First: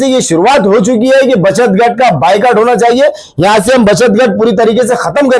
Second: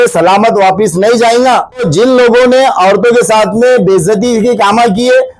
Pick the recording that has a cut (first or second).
second